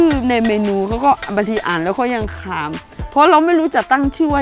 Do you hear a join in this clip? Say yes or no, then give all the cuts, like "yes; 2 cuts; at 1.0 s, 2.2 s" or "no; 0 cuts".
no; 0 cuts